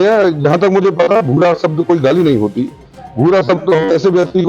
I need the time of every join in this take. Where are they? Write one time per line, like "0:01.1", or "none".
none